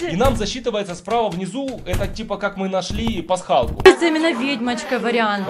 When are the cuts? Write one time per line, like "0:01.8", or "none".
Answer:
0:03.8